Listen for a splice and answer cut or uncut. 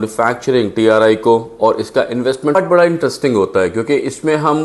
cut